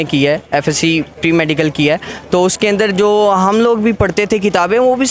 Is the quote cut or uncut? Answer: uncut